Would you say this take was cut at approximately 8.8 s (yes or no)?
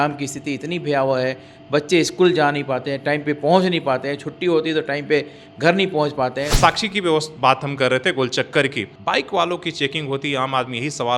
yes